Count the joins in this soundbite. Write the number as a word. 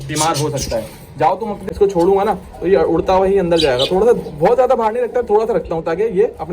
one